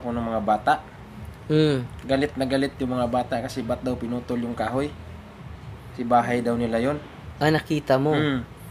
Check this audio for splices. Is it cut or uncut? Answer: uncut